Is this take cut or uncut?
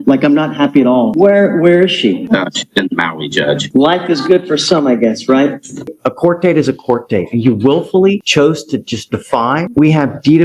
cut